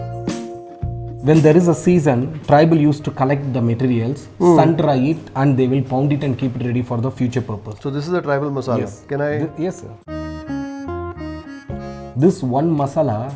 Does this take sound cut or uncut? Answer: uncut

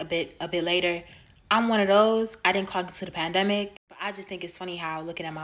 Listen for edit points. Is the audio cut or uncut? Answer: cut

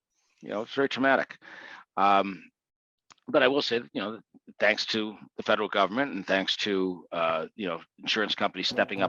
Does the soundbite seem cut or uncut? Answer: uncut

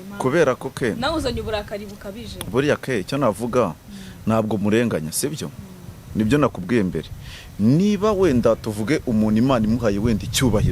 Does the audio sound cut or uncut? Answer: uncut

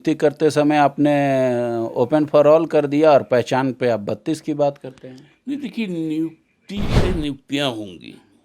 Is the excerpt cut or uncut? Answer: cut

